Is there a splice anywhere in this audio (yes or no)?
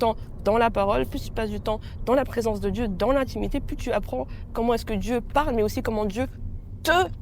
no